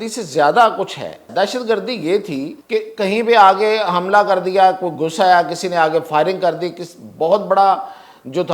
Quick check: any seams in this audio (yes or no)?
yes